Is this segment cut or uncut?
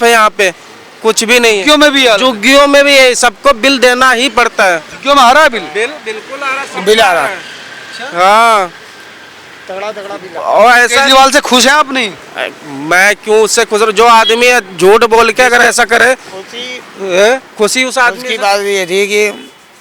uncut